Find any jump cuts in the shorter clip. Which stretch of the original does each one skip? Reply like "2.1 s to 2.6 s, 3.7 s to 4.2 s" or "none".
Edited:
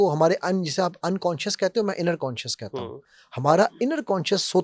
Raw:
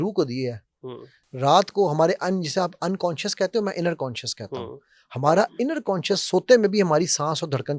none